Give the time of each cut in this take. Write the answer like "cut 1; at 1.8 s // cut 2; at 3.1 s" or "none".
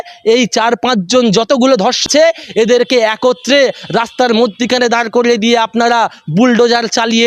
cut 1; at 2.0 s